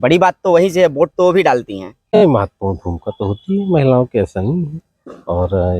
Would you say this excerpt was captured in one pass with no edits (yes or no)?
no